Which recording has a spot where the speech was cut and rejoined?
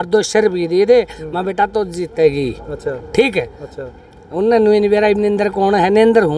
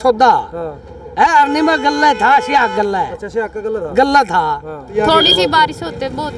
second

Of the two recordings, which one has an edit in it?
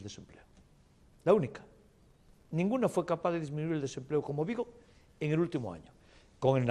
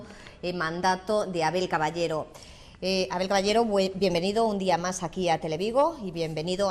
first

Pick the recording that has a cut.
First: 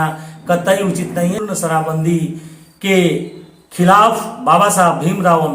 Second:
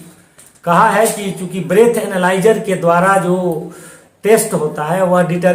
first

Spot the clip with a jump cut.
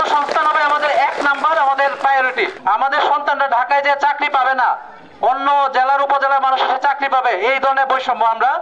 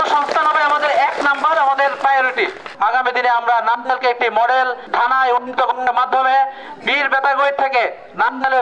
second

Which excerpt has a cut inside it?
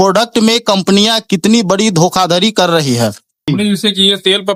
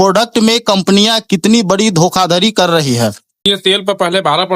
second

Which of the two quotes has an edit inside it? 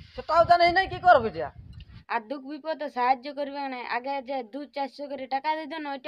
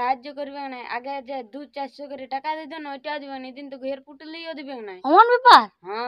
first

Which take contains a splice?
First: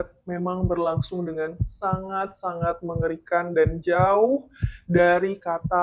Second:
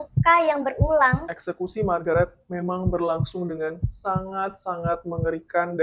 second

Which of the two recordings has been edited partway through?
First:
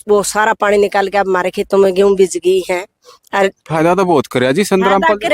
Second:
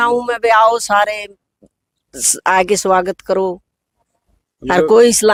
first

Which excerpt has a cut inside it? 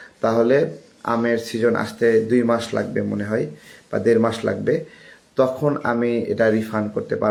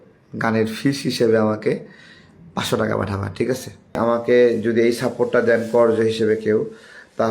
second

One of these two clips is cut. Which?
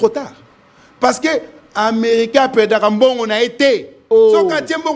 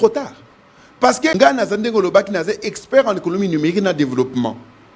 second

